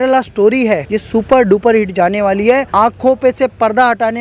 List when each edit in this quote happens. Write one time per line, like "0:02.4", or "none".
0:00.9
0:02.7